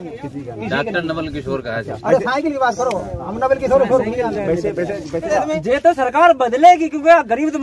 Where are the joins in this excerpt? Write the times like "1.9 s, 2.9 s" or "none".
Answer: 5.3 s